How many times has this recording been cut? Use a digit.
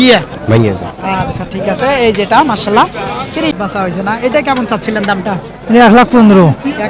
1